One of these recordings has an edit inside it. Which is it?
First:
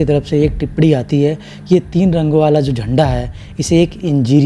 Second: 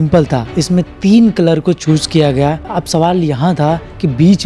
second; 1 cut; at 2.7 s

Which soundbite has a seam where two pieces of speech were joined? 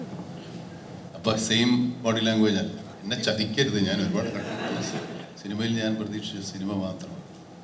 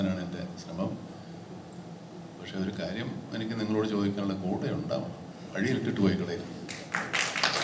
first; 2 cuts; at 2.9 s, 5.2 s

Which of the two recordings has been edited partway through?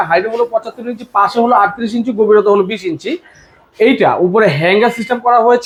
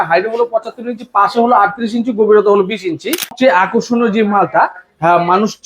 second; 1 cut; at 3.3 s

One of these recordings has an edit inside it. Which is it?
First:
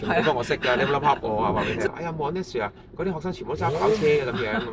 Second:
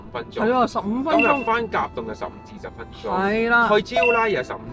first; 1 cut; at 1.9 s

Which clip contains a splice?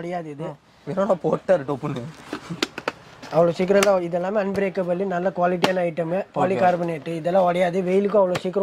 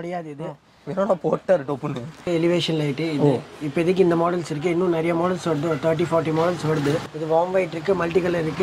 second; 2 cuts; at 2.3 s, 7.0 s

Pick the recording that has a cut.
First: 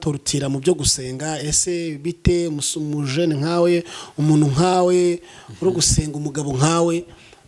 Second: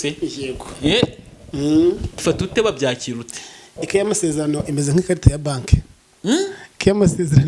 second; 1 cut; at 2.2 s

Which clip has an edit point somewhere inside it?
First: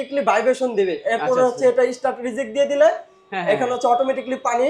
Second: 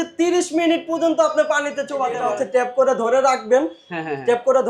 second; 1 cut; at 2.2 s

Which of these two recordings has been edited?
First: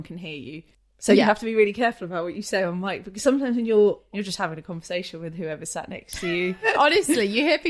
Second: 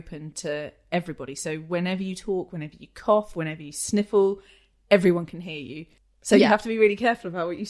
first; 1 cut; at 4.0 s

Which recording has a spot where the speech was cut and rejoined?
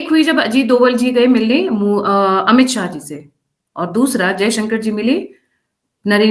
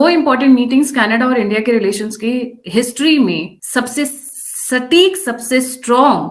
second; 1 cut; at 3.6 s

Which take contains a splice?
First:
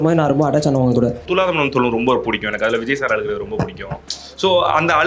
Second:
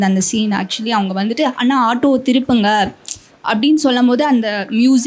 first; 1 cut; at 1.2 s

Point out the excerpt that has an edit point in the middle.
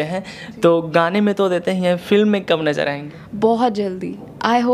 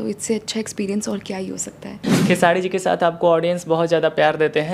second; 1 cut; at 2.1 s

